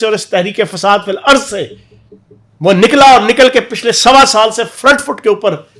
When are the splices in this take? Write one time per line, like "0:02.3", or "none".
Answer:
none